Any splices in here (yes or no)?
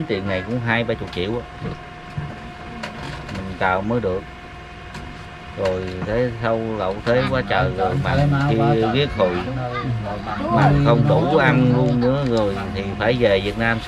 no